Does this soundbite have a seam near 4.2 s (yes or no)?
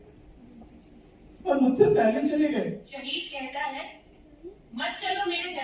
no